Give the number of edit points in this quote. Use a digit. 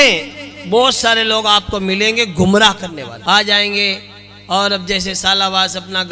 1